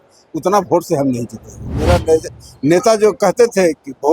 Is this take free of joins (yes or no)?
no